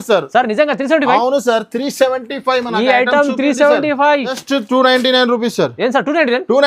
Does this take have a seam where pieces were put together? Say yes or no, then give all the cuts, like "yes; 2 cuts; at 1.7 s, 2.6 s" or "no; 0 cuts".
yes; 1 cut; at 4.4 s